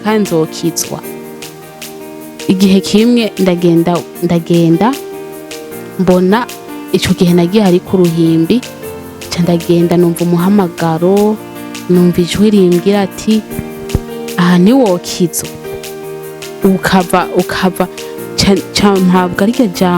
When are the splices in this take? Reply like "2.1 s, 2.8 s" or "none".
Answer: none